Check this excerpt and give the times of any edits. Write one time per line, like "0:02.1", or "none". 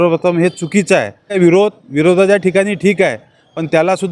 0:01.4